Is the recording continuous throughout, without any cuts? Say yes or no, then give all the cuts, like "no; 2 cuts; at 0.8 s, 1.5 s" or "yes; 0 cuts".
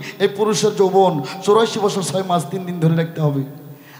yes; 0 cuts